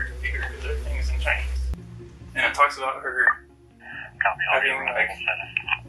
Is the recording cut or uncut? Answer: cut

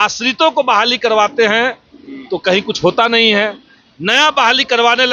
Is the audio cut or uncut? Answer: uncut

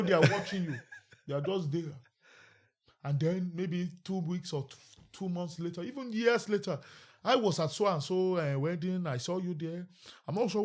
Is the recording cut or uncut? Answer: uncut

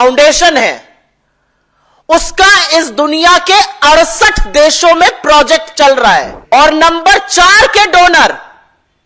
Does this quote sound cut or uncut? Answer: cut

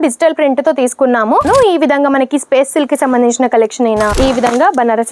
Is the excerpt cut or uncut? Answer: cut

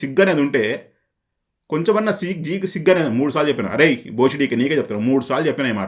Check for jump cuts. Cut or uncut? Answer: uncut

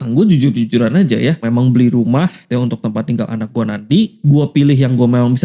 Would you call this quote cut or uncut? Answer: cut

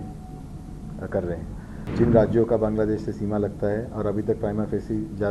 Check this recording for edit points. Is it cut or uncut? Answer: cut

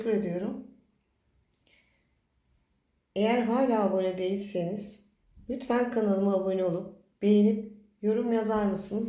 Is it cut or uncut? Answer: uncut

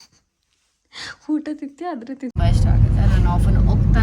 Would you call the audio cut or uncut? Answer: cut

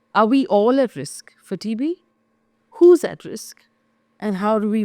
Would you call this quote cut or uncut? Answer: uncut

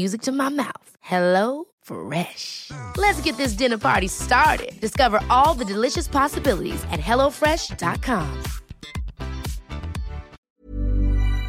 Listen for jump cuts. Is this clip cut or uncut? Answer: cut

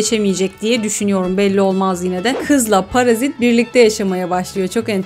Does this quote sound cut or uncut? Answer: cut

